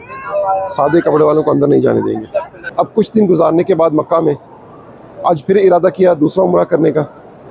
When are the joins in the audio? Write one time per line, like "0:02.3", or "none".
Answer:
0:02.6

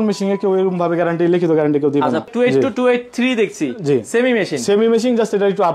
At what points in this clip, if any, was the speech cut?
0:02.3

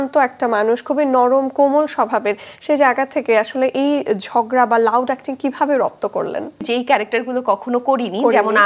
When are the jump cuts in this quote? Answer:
0:06.6

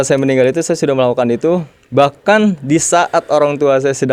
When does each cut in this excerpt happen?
none

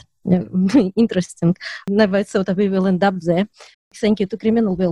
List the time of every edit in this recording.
0:03.9

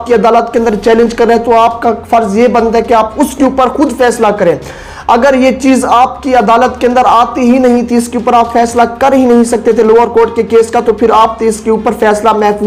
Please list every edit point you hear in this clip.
none

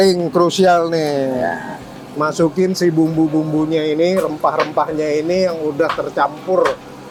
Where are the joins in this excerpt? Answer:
none

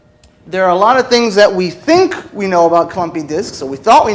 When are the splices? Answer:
0:02.1

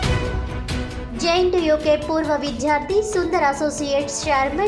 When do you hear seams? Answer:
0:01.0

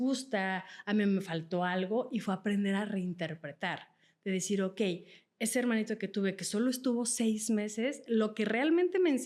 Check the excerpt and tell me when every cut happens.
none

